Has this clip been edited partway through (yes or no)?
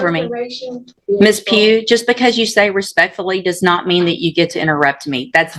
yes